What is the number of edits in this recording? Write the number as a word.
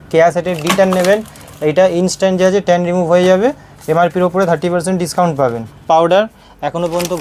one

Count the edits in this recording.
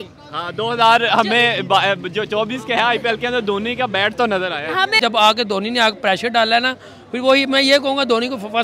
one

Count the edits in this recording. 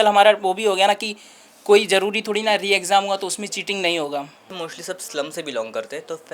one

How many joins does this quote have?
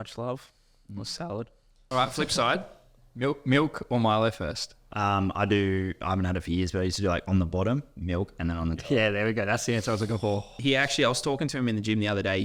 three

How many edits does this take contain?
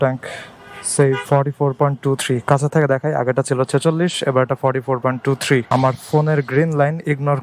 two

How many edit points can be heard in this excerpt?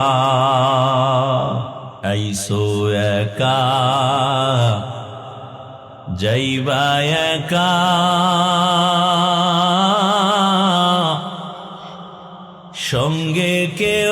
one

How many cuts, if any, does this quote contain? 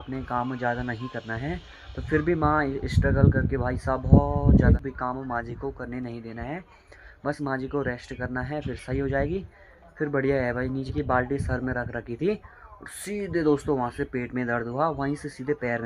two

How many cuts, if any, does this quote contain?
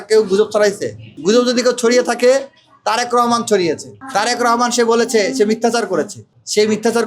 one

